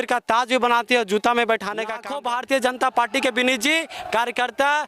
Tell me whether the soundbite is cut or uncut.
cut